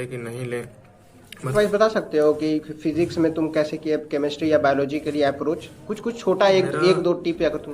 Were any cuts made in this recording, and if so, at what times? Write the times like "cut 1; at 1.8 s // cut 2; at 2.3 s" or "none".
cut 1; at 1.5 s